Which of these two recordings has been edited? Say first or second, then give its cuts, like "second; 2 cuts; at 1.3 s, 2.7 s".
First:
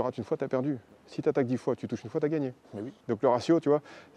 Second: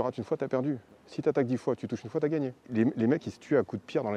second; 1 cut; at 2.6 s